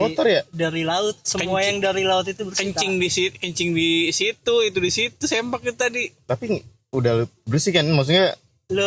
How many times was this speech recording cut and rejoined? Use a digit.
0